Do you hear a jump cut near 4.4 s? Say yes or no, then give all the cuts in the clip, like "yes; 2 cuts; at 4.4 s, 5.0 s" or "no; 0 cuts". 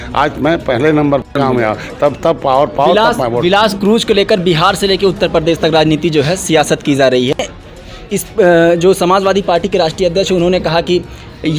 no; 2 cuts; at 1.3 s, 7.5 s